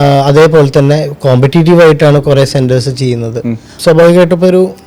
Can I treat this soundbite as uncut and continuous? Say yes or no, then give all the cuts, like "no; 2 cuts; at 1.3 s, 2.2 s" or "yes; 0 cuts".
no; 1 cut; at 3.8 s